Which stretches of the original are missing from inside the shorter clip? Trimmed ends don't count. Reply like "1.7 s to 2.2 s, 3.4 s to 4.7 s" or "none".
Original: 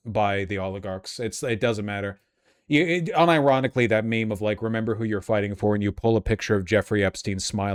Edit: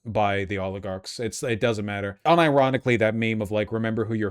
2.2 s to 3.1 s